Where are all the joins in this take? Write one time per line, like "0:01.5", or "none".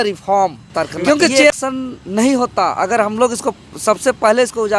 0:01.5